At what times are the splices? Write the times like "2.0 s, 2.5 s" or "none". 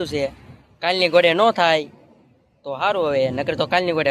none